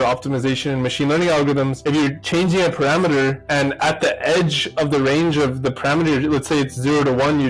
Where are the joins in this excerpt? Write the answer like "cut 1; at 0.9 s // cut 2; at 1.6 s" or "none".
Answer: none